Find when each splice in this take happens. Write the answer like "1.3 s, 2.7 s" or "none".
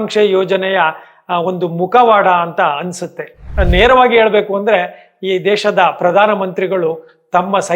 3.5 s